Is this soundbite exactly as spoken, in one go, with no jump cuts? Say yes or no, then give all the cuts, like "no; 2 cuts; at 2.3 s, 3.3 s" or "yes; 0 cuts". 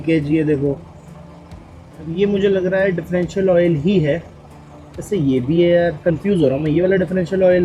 yes; 0 cuts